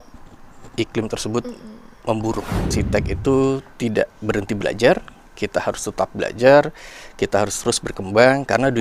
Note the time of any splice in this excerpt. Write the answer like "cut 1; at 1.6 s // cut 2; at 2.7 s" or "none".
cut 1; at 2.7 s